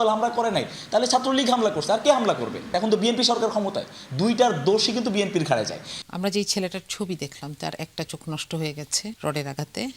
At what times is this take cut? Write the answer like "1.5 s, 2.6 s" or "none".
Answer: 2.7 s, 6.0 s, 9.2 s